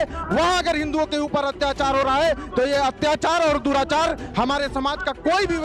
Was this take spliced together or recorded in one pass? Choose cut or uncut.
uncut